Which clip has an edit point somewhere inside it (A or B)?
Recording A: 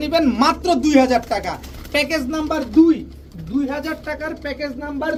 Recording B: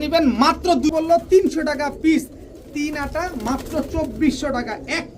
B